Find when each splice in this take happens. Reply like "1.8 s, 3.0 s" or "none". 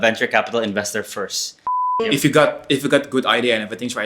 1.8 s